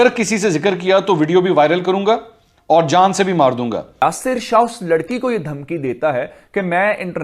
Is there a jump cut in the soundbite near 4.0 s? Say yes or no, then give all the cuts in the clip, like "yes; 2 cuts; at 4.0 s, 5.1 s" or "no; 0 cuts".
yes; 1 cut; at 4.0 s